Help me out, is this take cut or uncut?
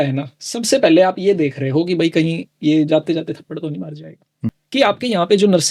cut